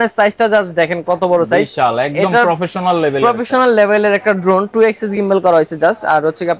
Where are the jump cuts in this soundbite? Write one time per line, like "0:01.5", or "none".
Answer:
none